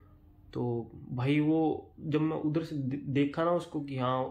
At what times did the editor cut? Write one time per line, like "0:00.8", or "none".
none

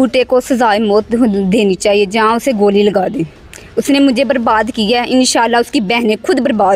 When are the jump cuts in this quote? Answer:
none

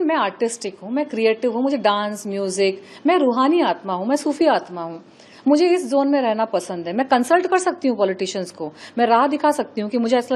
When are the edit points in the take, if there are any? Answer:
none

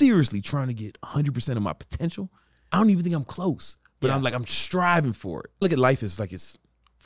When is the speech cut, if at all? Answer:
0:00.9
0:02.6
0:05.6

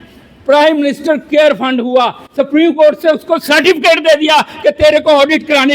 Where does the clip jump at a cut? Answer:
none

